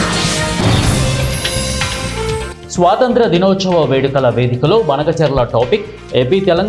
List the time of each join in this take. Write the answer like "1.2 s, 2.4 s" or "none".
2.5 s